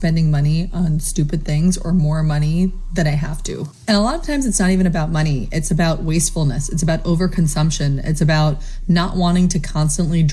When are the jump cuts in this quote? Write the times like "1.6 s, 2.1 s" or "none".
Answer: none